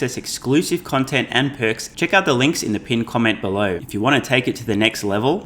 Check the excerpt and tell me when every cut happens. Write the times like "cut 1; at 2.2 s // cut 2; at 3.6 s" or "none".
cut 1; at 1.9 s // cut 2; at 3.8 s